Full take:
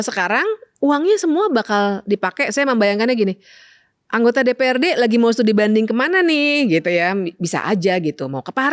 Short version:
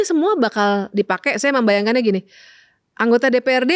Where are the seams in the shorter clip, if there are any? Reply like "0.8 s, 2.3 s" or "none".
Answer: none